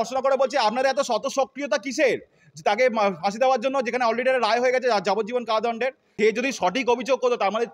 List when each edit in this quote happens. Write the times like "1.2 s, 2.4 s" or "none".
6.0 s